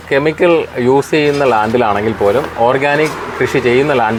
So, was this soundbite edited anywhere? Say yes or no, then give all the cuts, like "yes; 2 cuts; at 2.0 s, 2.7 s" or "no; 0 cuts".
no; 0 cuts